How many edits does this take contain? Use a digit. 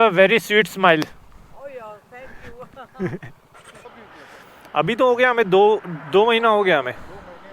1